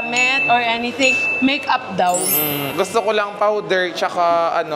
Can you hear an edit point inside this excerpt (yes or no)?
yes